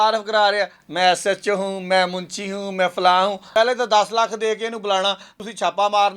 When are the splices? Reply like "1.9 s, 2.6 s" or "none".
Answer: 3.4 s, 5.3 s